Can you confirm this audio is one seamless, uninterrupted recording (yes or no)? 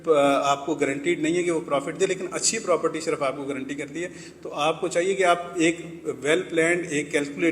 yes